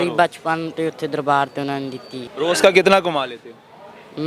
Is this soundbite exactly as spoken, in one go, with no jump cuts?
no; 1 cut; at 2.2 s

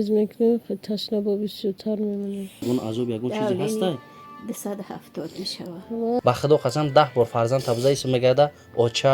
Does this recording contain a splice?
yes; 2 cuts; at 2.6 s, 6.2 s

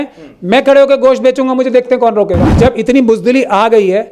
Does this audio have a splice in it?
yes; 1 cut; at 2.5 s

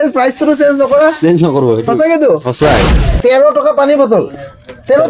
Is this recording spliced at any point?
yes; 1 cut; at 2.8 s

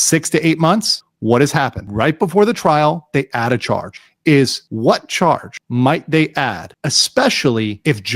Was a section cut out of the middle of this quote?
no; 0 cuts

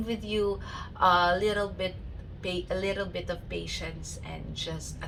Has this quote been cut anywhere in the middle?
no; 0 cuts

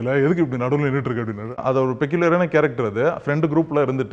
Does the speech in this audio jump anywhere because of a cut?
yes; 1 cut; at 1.6 s

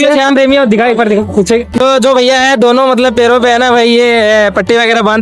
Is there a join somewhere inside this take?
yes; 1 cut; at 1.8 s

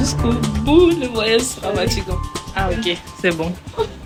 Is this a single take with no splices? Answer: yes; 0 cuts

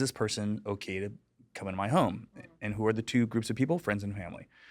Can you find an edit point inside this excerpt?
no; 0 cuts

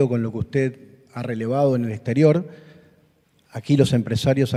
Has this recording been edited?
no; 0 cuts

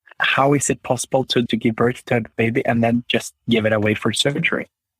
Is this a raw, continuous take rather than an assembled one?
yes; 0 cuts

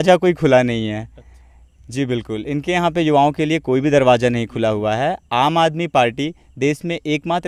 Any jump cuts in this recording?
no; 0 cuts

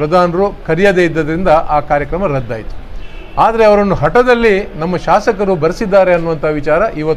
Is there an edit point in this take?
no; 0 cuts

